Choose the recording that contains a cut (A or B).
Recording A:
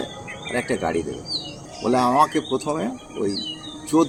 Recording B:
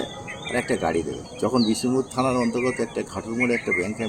B